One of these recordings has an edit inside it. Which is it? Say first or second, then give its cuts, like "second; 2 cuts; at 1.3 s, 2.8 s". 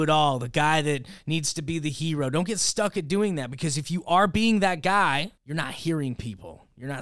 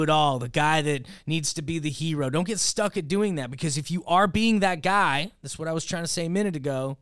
first; 1 cut; at 5.4 s